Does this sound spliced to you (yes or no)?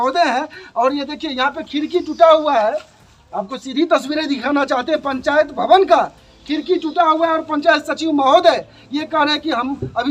no